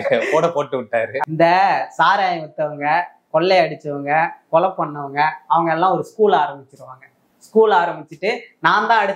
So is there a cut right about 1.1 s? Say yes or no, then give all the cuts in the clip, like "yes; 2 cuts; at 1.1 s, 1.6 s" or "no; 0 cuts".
yes; 1 cut; at 1.1 s